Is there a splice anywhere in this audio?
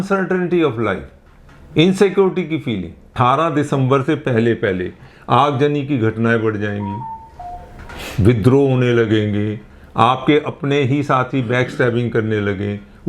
yes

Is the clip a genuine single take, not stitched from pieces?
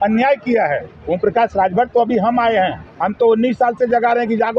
no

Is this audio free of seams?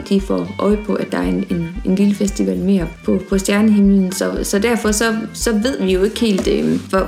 no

